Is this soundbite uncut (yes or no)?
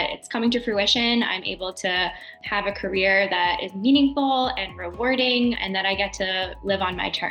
no